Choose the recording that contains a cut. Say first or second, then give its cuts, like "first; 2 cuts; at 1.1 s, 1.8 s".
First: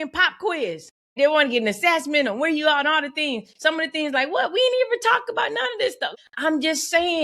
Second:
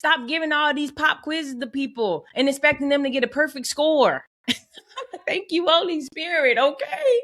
first; 2 cuts; at 1.1 s, 6.1 s